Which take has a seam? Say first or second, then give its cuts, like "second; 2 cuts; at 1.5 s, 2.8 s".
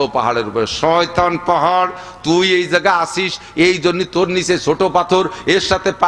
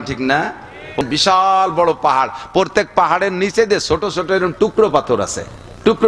second; 1 cut; at 1.0 s